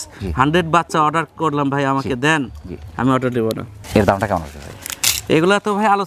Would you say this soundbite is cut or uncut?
uncut